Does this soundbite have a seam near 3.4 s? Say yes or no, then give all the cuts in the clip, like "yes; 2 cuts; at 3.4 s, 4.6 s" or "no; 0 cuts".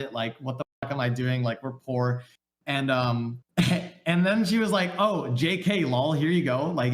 yes; 1 cut; at 3.4 s